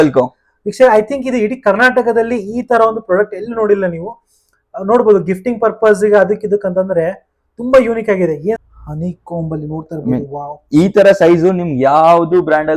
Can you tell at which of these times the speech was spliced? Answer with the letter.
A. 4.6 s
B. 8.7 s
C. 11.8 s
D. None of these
B